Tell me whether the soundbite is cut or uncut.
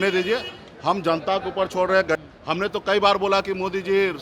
cut